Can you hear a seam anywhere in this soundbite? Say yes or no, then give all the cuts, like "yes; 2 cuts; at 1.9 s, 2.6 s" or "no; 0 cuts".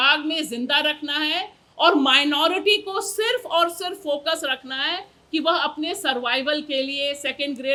no; 0 cuts